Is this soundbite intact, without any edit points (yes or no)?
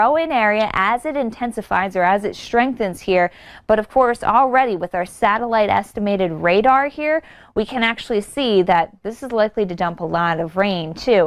yes